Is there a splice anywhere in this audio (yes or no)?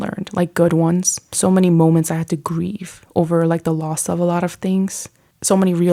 no